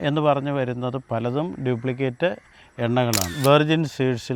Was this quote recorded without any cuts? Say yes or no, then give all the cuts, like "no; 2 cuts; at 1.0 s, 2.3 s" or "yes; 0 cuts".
no; 1 cut; at 3.4 s